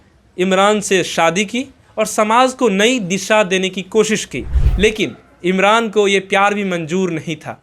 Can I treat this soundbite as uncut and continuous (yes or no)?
no